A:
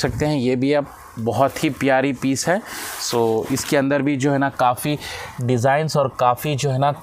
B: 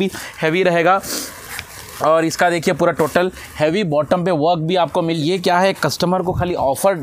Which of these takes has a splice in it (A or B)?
B